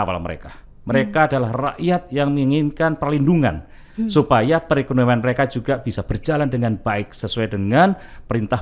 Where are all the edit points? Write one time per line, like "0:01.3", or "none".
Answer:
none